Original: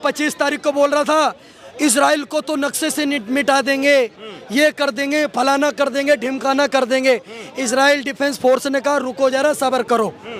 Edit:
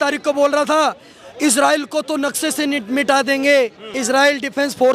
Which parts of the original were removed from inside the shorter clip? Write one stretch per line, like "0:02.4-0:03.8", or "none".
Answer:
0:04.3-0:07.5